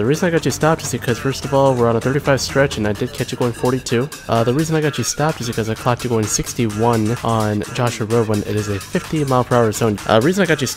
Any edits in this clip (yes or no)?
yes